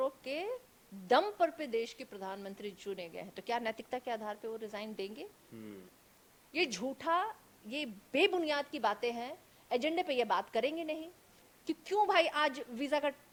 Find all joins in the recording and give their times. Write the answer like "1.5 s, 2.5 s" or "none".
none